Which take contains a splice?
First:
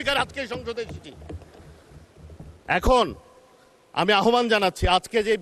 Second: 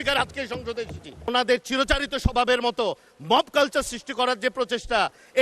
second; 1 cut; at 1.3 s

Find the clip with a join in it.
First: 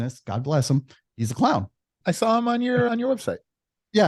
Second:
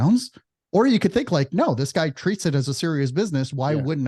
first; 3 cuts; at 1.0 s, 1.9 s, 2.9 s

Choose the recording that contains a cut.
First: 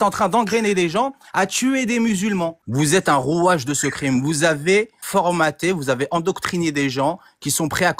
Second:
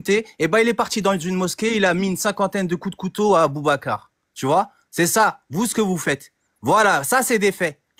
first; 2 cuts; at 2.6 s, 5.0 s

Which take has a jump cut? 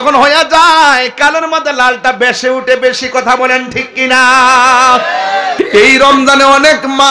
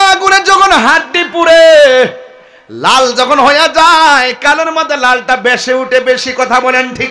first; 1 cut; at 5.5 s

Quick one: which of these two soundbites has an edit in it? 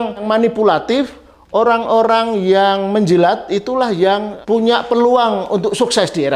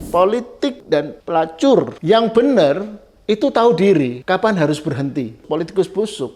second; 4 cuts; at 0.9 s, 1.9 s, 4.2 s, 5.4 s

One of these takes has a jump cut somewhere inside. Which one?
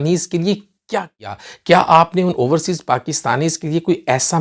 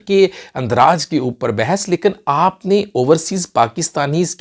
first; 1 cut; at 1.5 s

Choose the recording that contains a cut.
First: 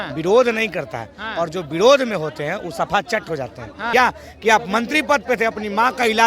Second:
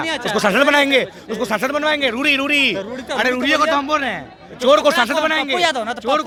first; 1 cut; at 3.9 s

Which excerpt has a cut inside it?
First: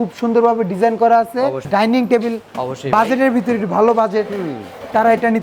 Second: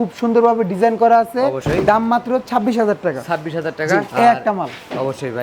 first; 1 cut; at 1.6 s

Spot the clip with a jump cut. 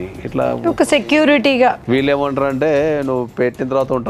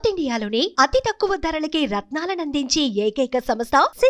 first; 1 cut; at 1.8 s

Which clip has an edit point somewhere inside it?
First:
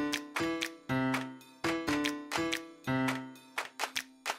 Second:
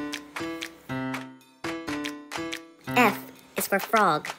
first; 1 cut; at 2.9 s

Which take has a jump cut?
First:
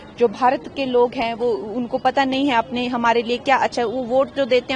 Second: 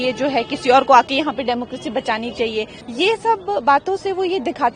second; 1 cut; at 2.8 s

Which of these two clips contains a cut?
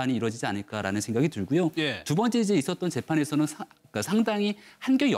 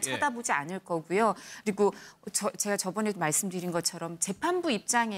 first; 1 cut; at 3.9 s

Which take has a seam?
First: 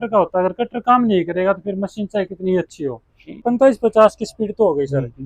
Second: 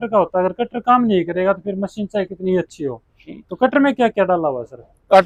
first; 1 cut; at 3.4 s

